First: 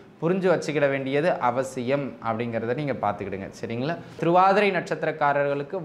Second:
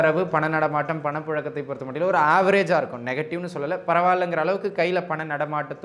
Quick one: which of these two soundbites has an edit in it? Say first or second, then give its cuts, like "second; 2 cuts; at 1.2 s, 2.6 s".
first; 1 cut; at 4.2 s